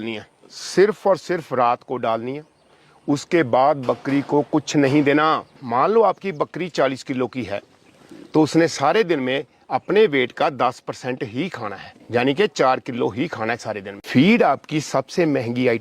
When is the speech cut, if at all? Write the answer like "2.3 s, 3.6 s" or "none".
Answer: 5.6 s, 13.9 s